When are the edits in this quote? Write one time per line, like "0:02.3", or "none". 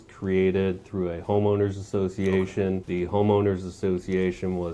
0:02.8